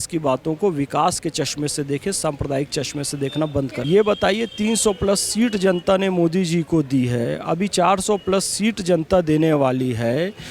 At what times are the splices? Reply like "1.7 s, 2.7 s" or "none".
3.8 s